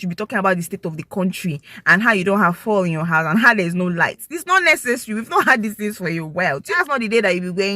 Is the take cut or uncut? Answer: cut